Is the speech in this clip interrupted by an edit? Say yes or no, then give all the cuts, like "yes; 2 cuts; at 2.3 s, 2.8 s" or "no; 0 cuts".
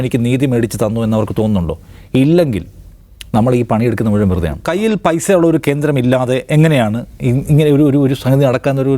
yes; 1 cut; at 4.6 s